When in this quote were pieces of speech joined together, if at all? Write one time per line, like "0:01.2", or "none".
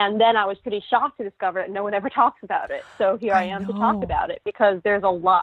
none